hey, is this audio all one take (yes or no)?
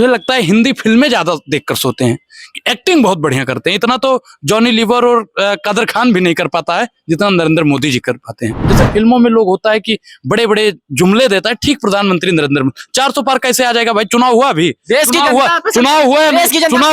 no